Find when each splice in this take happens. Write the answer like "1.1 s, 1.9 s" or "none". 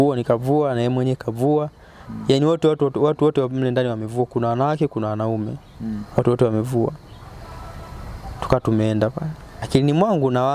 9.7 s